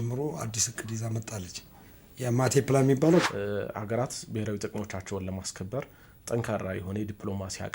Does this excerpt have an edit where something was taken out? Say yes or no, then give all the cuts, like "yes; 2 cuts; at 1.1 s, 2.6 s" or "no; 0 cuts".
yes; 1 cut; at 3.3 s